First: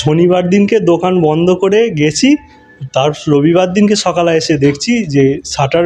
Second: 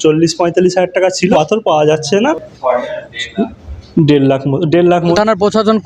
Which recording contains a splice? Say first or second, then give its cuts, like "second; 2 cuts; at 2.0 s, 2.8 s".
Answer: second; 3 cuts; at 1.3 s, 2.3 s, 5.1 s